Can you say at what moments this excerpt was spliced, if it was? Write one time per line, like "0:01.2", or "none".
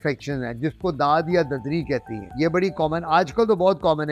none